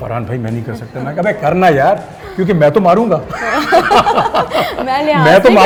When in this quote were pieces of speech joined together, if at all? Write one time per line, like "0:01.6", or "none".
none